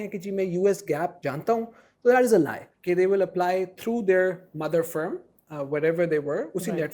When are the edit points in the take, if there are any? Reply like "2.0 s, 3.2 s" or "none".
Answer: 1.2 s, 2.7 s